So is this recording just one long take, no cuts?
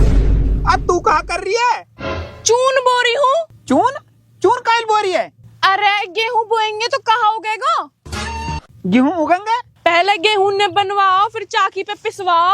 no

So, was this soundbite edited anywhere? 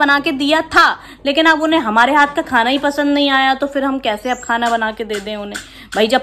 no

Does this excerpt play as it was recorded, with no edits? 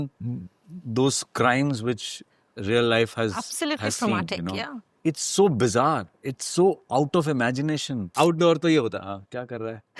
no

